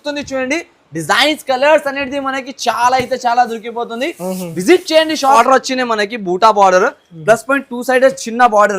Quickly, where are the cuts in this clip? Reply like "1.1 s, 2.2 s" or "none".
5.4 s